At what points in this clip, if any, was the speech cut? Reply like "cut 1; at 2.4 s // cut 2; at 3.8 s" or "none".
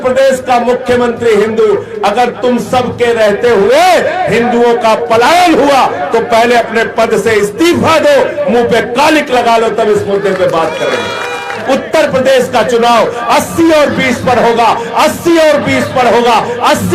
cut 1; at 11.6 s